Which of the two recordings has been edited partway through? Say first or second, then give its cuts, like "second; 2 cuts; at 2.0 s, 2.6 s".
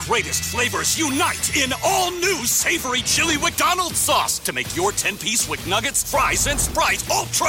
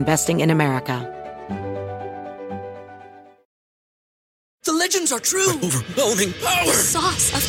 second; 1 cut; at 1.0 s